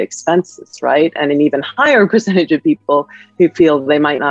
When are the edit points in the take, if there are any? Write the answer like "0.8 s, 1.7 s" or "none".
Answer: none